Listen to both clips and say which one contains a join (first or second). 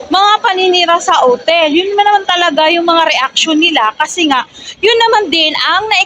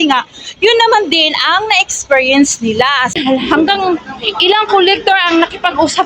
second